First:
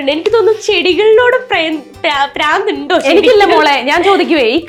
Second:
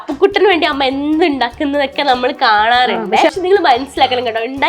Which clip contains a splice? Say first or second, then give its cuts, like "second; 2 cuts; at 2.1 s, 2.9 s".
second; 1 cut; at 3.3 s